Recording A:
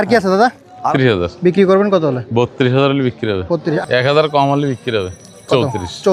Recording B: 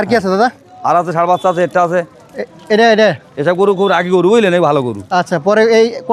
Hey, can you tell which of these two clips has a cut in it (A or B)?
A